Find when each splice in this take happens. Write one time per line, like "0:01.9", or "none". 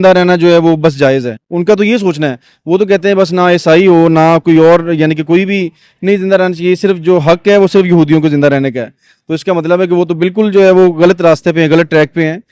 none